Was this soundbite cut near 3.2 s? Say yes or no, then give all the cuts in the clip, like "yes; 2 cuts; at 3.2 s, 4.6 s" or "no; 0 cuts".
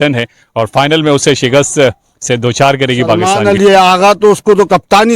yes; 1 cut; at 3.2 s